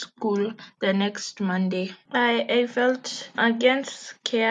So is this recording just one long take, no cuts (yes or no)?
yes